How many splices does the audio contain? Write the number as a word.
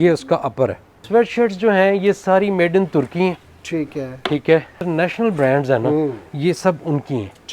two